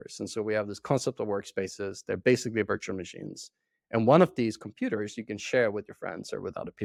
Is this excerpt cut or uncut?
uncut